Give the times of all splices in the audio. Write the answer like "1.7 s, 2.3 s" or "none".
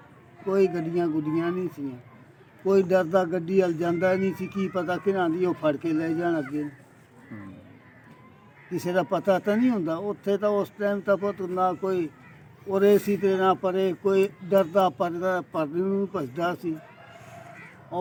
none